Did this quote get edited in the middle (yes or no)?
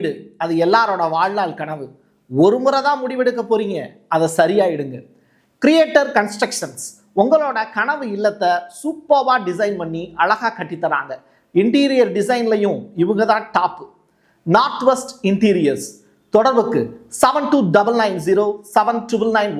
no